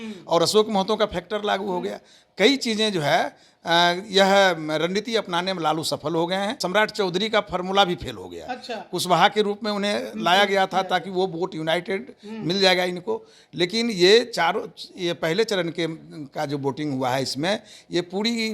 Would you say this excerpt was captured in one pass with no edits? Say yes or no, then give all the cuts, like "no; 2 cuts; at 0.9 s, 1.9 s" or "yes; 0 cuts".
no; 1 cut; at 6.6 s